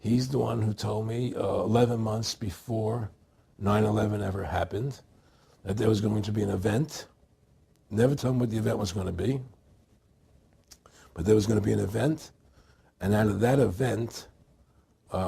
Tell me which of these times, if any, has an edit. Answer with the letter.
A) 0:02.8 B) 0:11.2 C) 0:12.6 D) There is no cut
B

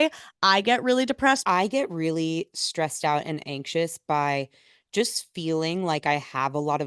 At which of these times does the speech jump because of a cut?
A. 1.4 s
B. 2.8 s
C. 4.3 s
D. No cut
A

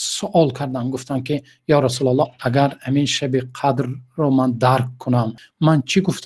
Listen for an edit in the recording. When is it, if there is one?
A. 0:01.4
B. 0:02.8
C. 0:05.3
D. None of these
C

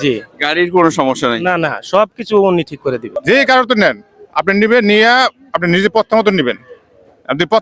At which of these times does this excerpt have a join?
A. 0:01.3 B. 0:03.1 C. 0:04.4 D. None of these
B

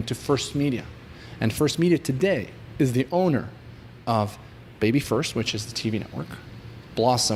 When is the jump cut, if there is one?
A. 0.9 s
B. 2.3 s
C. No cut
C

